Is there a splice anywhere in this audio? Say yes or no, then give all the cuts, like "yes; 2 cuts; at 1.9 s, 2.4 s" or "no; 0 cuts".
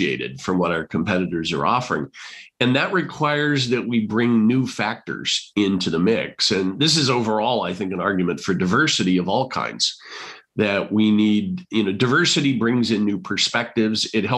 no; 0 cuts